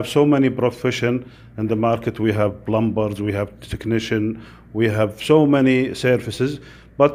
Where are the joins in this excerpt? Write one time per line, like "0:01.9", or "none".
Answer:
none